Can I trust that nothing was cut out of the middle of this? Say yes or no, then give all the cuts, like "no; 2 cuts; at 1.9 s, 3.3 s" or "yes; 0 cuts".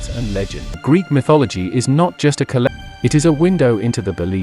no; 2 cuts; at 0.8 s, 2.7 s